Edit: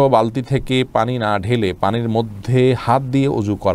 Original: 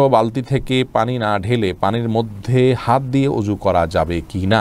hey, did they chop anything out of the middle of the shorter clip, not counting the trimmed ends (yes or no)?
no